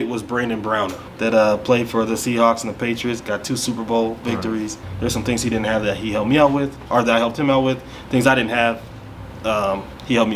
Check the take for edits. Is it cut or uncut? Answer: cut